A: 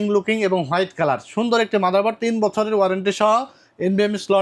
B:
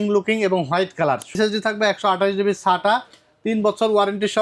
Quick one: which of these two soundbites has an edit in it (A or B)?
B